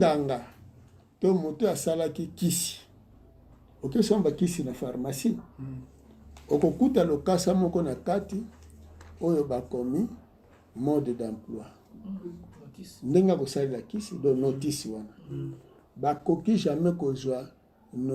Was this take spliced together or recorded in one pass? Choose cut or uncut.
uncut